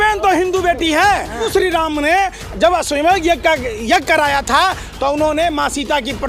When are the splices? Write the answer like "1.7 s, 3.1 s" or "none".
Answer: 1.5 s